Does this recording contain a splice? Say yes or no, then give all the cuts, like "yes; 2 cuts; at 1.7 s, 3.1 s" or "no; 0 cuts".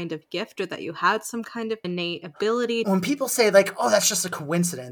yes; 2 cuts; at 1.8 s, 2.8 s